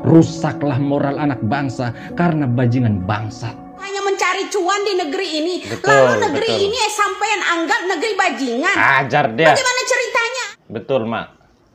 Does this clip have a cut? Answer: yes; 2 cuts; at 3.9 s, 10.4 s

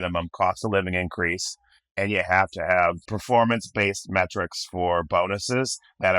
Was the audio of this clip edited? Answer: yes; 1 cut; at 3.1 s

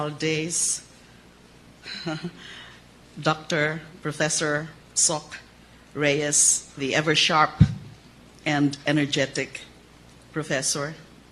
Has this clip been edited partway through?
yes; 1 cut; at 4.3 s

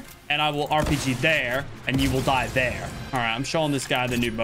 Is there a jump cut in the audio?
yes; 1 cut; at 3.0 s

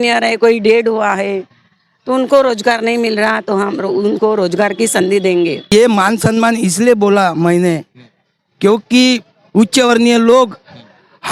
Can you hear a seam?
yes; 1 cut; at 5.7 s

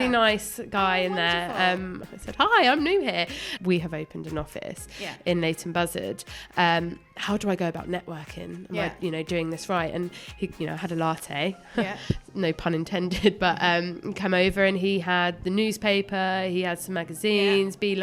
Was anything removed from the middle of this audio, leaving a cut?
yes; 2 cuts; at 2.0 s, 3.5 s

